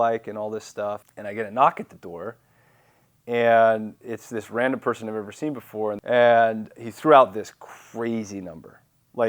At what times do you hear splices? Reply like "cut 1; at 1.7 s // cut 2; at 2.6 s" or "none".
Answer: cut 1; at 1.1 s // cut 2; at 6.0 s